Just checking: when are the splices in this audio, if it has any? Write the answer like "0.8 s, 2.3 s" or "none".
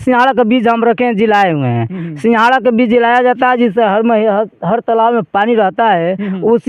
none

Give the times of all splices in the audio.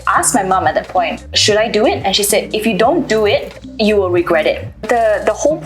1.2 s, 3.6 s, 4.8 s

